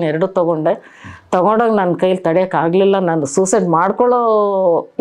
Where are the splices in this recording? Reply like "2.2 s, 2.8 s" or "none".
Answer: none